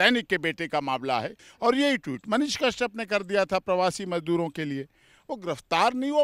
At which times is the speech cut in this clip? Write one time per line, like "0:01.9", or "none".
0:01.4